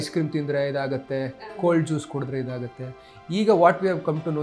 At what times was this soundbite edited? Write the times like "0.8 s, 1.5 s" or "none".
none